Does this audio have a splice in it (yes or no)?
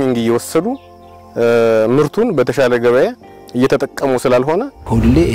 no